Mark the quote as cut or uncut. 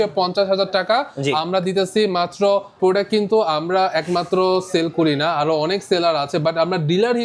cut